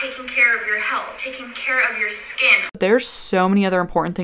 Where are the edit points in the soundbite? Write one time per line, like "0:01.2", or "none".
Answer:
0:02.6